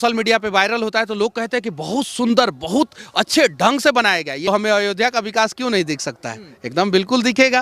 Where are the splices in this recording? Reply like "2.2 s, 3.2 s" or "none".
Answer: 4.5 s